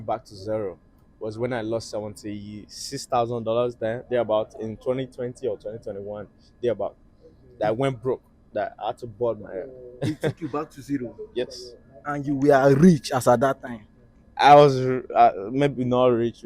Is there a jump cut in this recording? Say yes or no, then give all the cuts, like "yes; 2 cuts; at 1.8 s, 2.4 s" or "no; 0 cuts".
no; 0 cuts